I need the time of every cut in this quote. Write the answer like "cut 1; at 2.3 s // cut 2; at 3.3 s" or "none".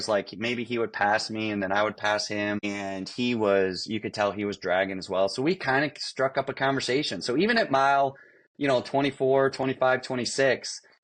none